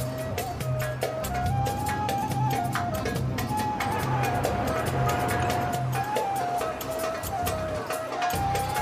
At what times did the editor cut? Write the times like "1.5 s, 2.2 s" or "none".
6.9 s